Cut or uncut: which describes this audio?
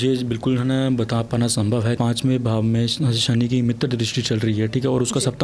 cut